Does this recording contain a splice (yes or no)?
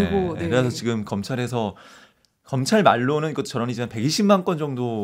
no